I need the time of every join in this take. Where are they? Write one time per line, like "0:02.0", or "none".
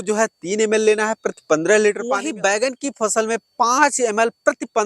0:02.3